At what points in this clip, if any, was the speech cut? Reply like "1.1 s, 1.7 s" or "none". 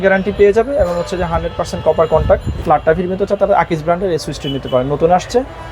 2.5 s